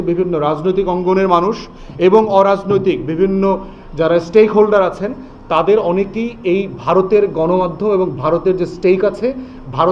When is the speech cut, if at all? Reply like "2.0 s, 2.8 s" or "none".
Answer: none